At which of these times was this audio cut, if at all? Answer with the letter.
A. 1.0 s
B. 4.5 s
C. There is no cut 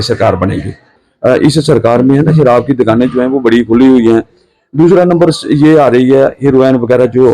A